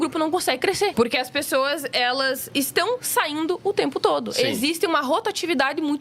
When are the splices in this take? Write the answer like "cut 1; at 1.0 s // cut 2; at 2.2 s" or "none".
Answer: cut 1; at 0.9 s // cut 2; at 2.4 s

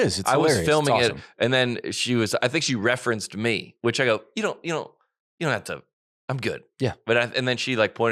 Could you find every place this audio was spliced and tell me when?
none

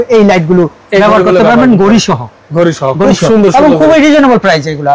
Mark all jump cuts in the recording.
none

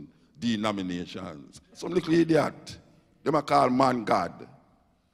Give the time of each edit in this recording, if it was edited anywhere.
cut 1; at 1.8 s

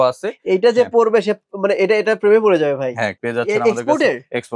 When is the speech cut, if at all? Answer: cut 1; at 3.2 s

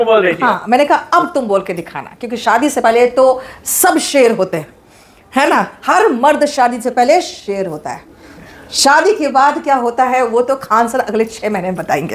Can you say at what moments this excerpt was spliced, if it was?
none

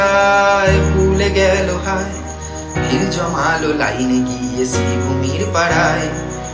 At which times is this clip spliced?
none

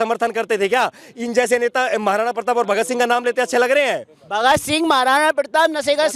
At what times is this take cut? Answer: none

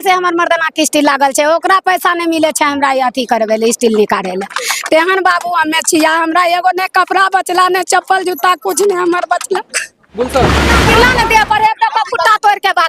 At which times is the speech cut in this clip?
cut 1; at 10.7 s

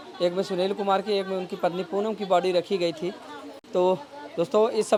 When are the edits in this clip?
none

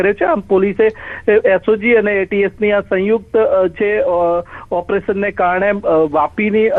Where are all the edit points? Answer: none

